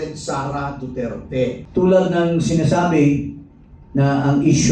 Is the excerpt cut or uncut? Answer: cut